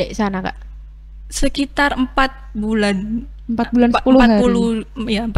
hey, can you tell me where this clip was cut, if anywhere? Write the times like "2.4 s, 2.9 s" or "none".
none